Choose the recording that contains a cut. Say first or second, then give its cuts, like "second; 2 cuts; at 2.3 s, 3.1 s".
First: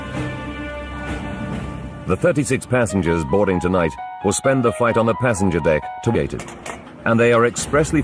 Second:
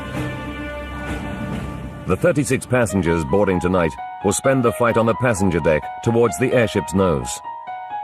second; 1 cut; at 6.1 s